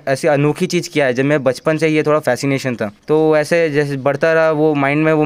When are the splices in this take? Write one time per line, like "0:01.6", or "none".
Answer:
none

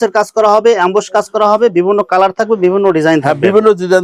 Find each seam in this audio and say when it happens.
none

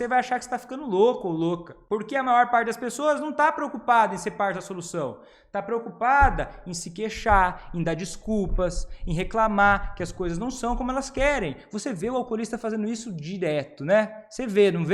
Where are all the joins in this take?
0:01.7

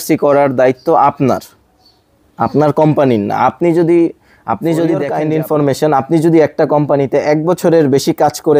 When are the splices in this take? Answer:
0:05.1

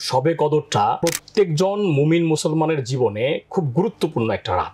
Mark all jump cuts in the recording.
0:01.0

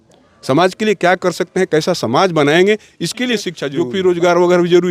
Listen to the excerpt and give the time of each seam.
0:03.6

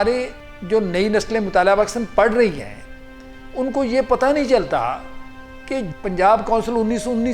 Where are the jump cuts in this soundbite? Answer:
0:05.9

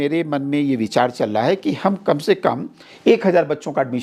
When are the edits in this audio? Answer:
none

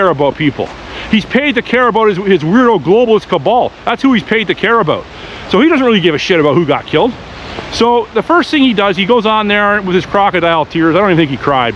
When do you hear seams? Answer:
none

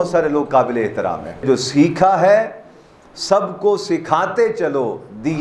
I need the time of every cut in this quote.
0:01.4

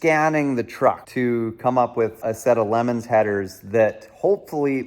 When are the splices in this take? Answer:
0:01.1
0:02.2

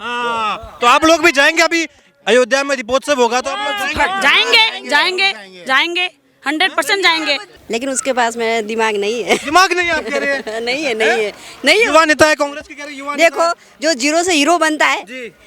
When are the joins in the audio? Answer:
0:07.5

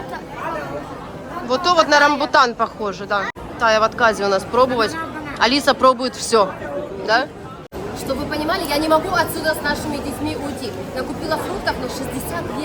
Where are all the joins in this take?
0:03.3
0:07.8

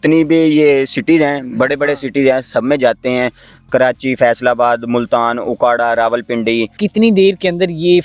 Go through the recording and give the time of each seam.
0:06.8

